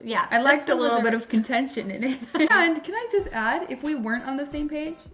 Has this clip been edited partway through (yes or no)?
yes